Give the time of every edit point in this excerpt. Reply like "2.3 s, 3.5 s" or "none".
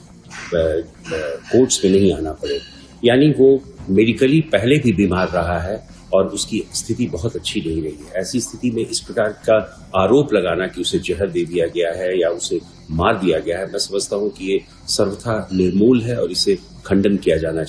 none